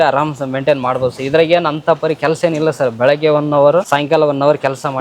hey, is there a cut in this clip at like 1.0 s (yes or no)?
no